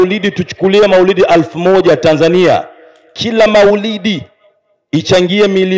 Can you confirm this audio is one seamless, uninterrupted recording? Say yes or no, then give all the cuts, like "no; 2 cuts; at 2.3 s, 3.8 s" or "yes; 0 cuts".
yes; 0 cuts